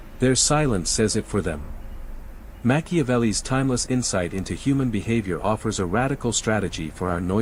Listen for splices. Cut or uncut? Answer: uncut